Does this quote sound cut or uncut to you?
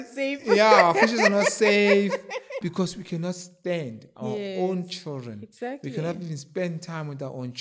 cut